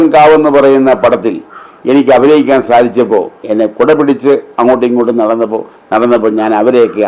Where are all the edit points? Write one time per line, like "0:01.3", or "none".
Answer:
0:03.4